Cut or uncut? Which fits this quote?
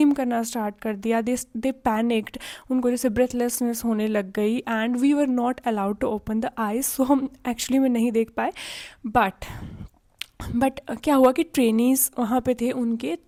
uncut